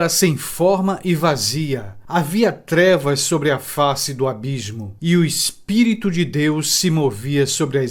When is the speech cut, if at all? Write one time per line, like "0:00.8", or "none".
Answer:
none